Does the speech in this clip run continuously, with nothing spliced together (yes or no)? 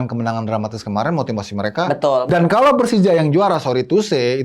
no